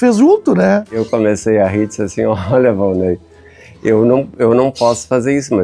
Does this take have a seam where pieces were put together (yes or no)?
yes